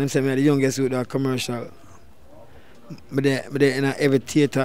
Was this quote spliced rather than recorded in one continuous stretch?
no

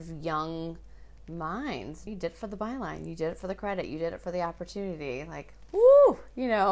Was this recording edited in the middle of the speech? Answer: yes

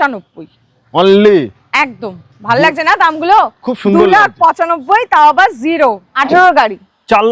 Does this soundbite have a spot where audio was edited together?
yes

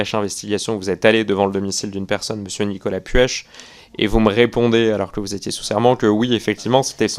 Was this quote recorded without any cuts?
yes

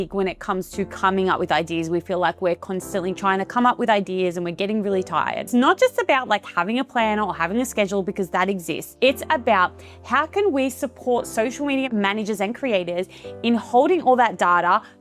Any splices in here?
yes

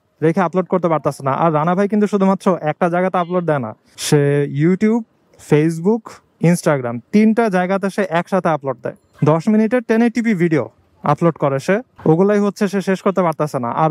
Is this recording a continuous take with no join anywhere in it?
no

